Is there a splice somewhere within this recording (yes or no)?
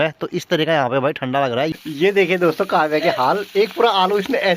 yes